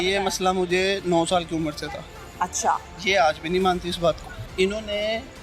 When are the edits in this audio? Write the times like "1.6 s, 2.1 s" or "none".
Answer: 4.4 s